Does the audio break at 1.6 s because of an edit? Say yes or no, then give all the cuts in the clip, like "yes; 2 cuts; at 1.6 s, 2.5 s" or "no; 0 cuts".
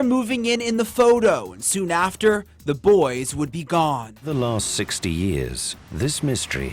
no; 1 cut; at 4.2 s